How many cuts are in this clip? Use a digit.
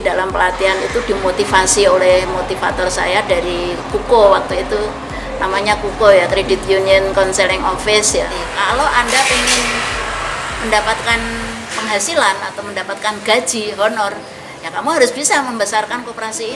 1